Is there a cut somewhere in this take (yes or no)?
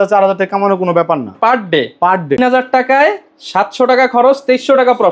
yes